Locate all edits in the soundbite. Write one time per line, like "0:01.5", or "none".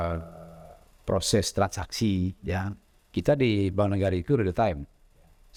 none